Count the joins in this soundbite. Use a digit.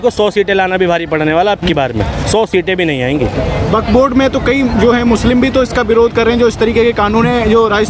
0